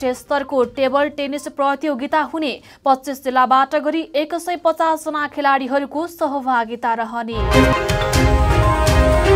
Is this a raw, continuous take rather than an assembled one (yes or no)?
yes